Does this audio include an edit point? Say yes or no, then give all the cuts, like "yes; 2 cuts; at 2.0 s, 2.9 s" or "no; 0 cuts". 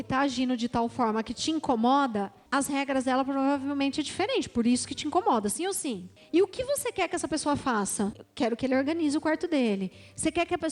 yes; 3 cuts; at 2.4 s, 6.1 s, 8.2 s